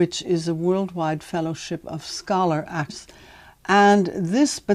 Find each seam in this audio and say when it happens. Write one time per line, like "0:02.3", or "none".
none